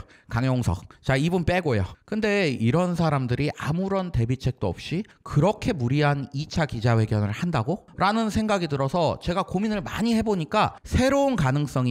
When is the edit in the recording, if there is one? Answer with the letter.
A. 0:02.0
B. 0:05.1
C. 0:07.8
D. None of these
A